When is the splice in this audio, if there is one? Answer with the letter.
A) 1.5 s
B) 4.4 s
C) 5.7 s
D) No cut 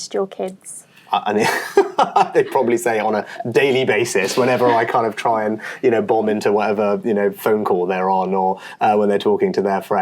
D